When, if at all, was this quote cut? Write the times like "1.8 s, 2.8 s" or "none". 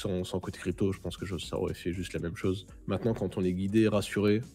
2.7 s